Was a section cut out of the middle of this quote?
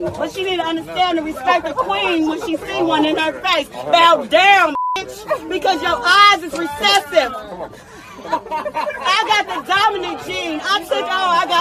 no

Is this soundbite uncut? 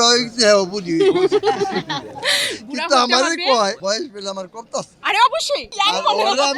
no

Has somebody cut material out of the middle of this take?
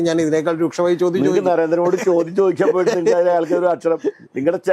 no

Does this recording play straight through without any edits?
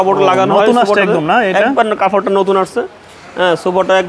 yes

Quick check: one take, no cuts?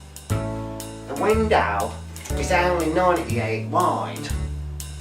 no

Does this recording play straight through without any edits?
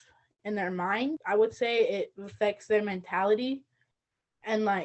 no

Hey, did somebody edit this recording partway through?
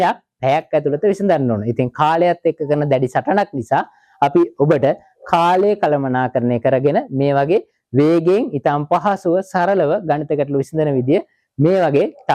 no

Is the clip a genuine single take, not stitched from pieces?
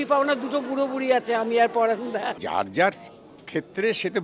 no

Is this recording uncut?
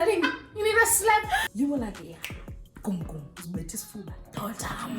no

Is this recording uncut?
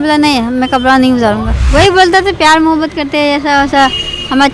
no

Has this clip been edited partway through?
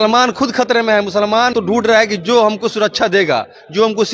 yes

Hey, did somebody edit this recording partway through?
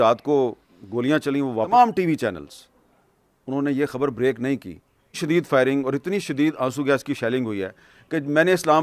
yes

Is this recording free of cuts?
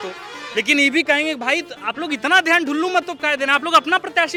yes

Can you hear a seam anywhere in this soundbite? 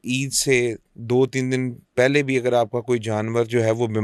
no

